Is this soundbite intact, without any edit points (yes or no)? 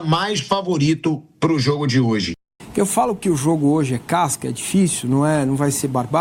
yes